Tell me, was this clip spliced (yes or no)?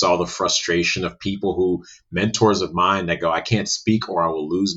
no